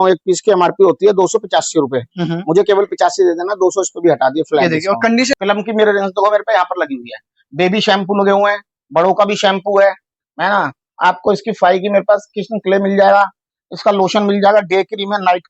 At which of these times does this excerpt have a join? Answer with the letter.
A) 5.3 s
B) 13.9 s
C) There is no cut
A